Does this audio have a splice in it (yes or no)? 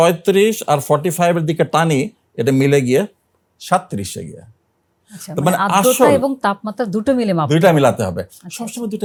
no